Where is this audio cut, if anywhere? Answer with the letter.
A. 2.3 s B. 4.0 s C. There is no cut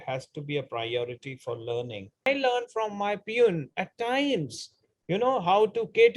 A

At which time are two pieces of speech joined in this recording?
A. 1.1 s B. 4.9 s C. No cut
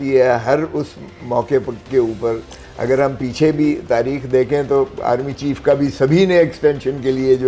C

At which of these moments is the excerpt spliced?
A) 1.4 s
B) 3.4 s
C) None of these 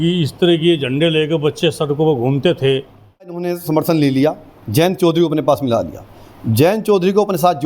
B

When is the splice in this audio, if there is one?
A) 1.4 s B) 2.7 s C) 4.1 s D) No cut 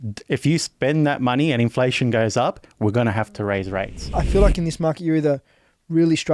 C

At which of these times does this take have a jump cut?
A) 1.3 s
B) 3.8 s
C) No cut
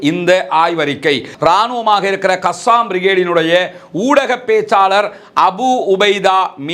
A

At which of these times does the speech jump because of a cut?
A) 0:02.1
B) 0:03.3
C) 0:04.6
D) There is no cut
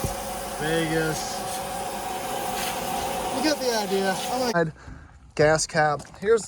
C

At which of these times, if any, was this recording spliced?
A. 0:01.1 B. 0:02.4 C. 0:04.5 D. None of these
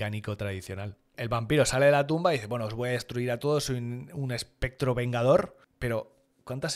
A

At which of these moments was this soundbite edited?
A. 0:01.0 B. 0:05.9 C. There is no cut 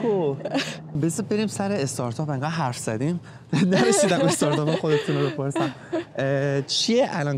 A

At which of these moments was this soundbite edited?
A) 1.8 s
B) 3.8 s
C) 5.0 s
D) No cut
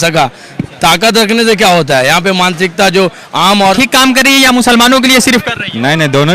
B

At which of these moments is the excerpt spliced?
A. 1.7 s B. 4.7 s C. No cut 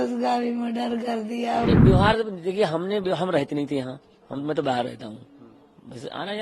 A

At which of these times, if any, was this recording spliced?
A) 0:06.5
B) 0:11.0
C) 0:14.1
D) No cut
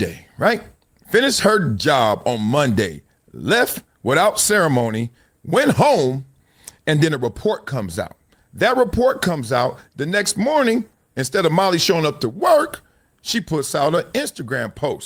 D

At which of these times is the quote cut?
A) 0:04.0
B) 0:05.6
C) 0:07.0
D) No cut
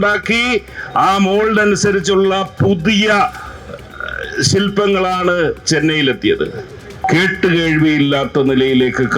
C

